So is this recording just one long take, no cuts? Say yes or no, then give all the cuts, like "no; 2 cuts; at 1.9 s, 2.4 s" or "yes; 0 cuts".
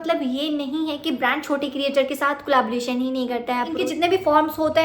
no; 1 cut; at 3.7 s